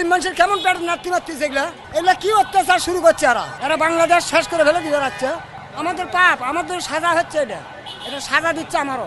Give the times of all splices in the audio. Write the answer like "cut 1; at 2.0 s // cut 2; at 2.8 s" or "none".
cut 1; at 1.8 s // cut 2; at 3.5 s // cut 3; at 5.6 s